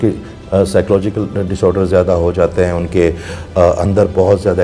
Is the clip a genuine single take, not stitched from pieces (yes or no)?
yes